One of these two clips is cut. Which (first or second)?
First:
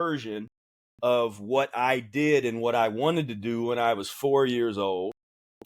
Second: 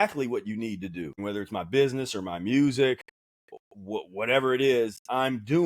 second